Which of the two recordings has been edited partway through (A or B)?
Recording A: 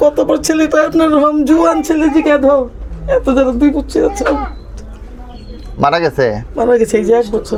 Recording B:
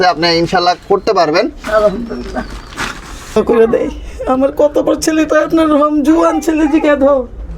B